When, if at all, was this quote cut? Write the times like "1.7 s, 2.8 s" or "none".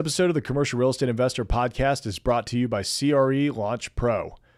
none

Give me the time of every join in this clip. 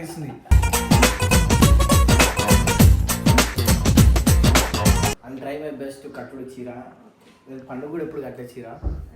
5.3 s

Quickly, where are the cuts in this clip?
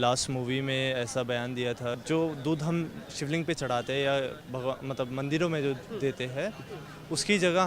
2.0 s

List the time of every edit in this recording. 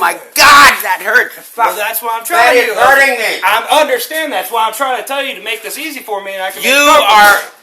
none

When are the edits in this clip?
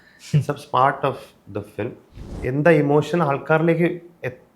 2.2 s

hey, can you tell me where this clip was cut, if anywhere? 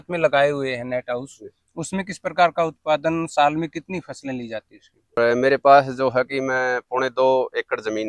5.2 s

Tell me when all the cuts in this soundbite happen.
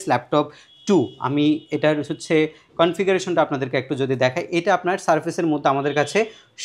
none

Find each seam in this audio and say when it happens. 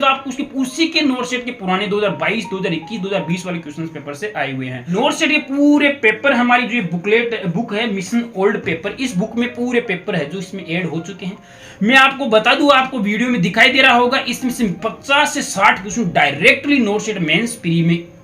4.9 s, 11.5 s

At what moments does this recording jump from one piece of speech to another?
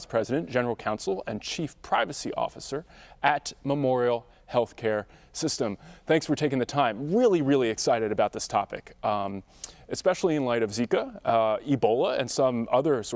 7.0 s

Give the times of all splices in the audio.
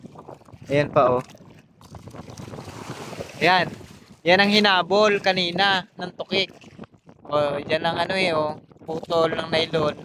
none

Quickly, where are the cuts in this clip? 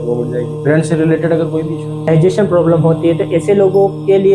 1.8 s

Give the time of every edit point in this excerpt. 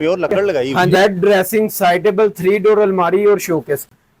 0.9 s

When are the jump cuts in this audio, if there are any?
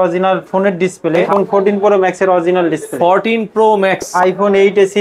1.2 s, 4.1 s

